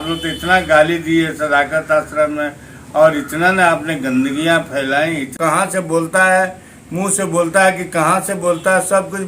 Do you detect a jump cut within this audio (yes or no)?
yes